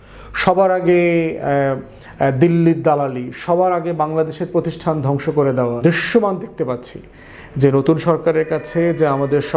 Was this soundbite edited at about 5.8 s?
yes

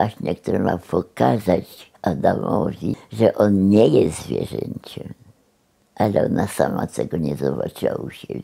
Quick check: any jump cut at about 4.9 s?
no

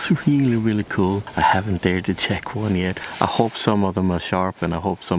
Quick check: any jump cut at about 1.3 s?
yes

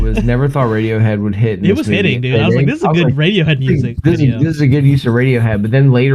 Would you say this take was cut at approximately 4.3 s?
no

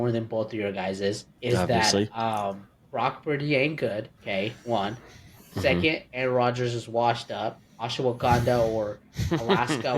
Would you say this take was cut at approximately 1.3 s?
yes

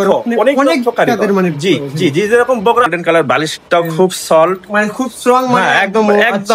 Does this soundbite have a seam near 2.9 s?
yes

